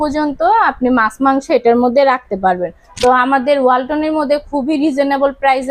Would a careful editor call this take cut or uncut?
uncut